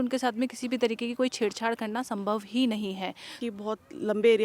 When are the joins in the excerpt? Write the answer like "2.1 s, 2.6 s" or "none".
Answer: 3.4 s